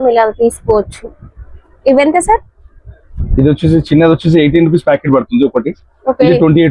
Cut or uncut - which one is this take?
uncut